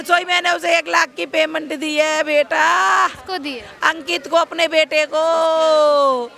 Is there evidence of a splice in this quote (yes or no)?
no